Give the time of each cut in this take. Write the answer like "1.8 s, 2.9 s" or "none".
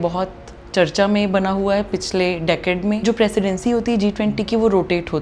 3.0 s